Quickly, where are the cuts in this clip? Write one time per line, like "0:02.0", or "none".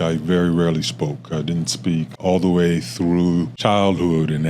0:02.2
0:03.5